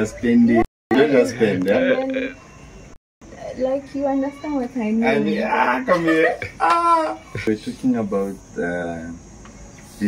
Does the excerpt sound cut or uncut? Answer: uncut